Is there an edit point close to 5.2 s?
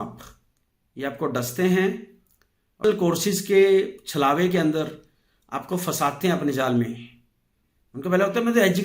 no; 1 cut; at 2.8 s

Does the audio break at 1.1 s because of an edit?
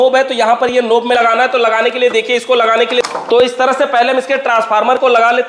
yes; 2 cuts; at 1.1 s, 3.1 s

